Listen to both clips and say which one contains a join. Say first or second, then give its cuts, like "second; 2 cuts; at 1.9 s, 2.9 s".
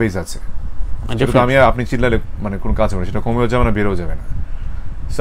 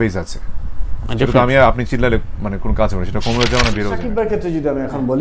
second; 1 cut; at 4.1 s